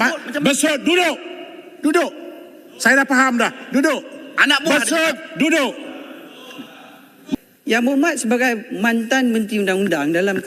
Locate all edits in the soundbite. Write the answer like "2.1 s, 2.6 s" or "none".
7.4 s